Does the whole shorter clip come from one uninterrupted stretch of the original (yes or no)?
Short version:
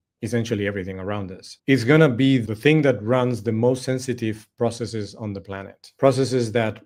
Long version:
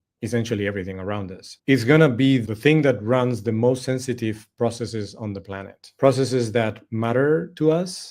yes